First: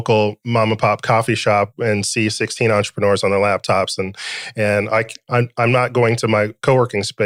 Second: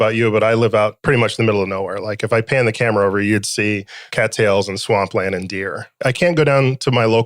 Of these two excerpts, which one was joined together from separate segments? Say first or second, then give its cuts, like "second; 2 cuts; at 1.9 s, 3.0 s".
second; 3 cuts; at 1.0 s, 4.0 s, 5.9 s